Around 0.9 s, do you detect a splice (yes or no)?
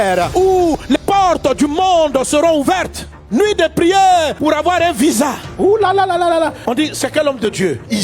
yes